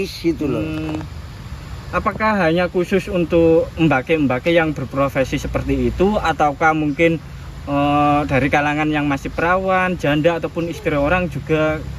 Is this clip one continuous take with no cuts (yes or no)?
yes